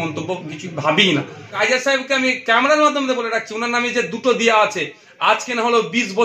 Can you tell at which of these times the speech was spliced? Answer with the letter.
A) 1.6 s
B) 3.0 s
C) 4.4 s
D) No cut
A